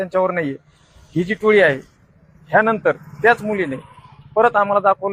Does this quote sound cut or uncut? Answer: uncut